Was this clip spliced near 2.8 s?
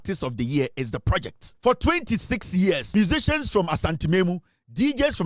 yes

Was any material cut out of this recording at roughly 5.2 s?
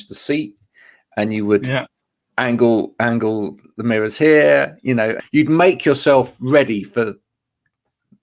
yes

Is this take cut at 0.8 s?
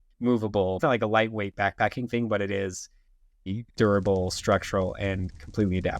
yes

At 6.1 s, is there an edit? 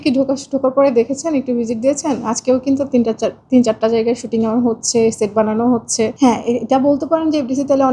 yes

